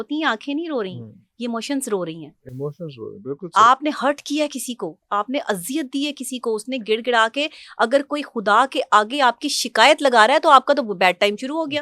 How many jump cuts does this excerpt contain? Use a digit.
0